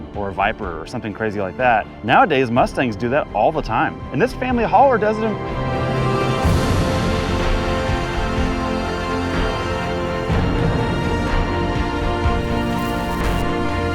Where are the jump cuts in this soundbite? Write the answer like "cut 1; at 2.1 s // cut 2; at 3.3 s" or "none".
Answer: cut 1; at 1.9 s // cut 2; at 4.0 s // cut 3; at 5.4 s